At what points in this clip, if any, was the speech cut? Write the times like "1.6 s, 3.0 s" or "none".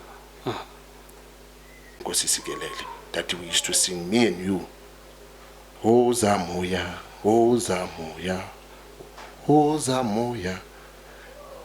2.0 s

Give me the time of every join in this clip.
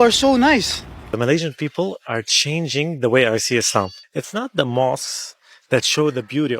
1.0 s, 4.0 s

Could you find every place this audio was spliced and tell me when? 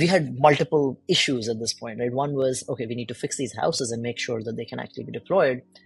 1.0 s

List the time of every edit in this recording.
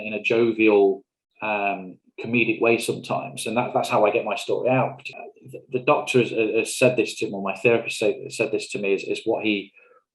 5.1 s

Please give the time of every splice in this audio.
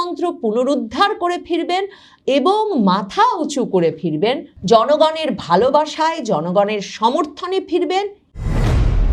8.2 s

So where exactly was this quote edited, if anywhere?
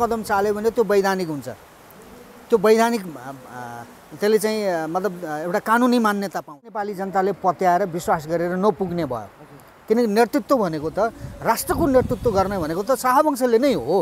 7.0 s

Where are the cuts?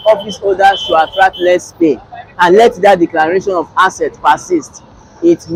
none

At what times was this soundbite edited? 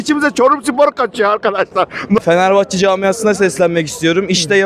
2.2 s

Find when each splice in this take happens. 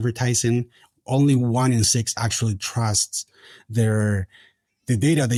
none

